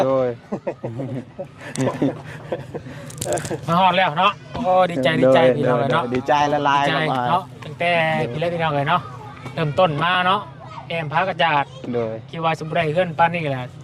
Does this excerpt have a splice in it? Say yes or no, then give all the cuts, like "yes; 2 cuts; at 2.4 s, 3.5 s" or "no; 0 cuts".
no; 0 cuts